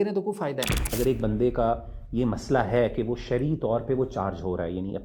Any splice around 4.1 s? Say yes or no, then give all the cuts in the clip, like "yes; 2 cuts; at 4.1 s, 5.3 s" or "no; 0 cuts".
no; 1 cut; at 0.9 s